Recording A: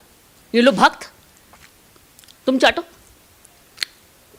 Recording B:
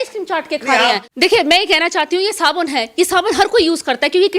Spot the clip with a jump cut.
B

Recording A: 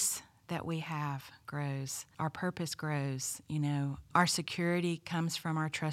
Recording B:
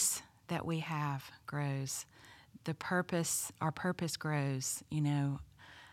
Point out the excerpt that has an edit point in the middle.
A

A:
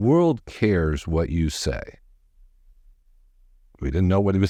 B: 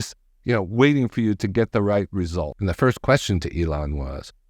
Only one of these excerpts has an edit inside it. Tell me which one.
B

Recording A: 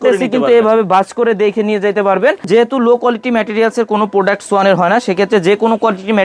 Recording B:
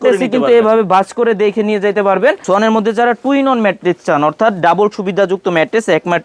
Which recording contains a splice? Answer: B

